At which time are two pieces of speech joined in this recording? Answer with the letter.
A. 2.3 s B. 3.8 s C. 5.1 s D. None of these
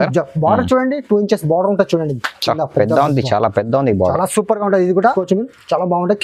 C